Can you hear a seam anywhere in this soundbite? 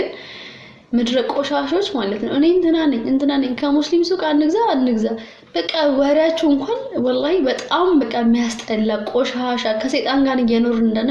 no; 0 cuts

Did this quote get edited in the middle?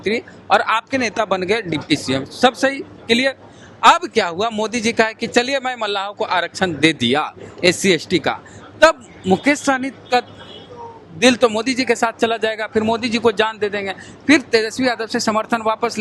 no; 0 cuts

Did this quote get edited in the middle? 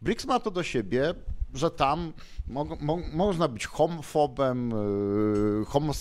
no; 0 cuts

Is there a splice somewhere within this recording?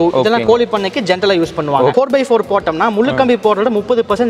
yes; 1 cut; at 1.9 s

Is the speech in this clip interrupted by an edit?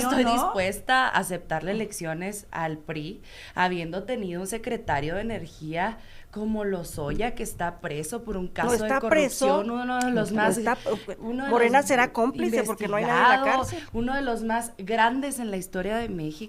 no; 0 cuts

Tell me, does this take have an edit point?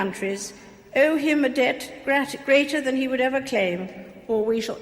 no; 0 cuts

